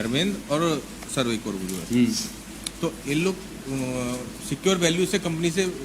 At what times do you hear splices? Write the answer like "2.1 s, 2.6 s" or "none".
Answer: none